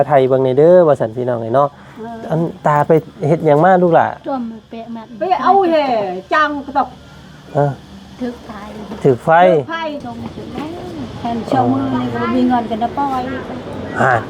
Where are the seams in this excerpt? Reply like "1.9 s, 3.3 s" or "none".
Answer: 10.0 s